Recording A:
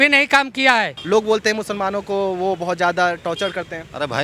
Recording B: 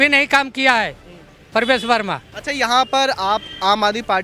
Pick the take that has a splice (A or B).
A